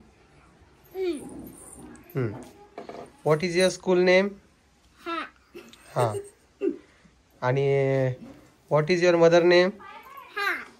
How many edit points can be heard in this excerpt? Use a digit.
0